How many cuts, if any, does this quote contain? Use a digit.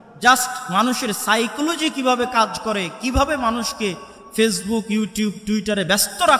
0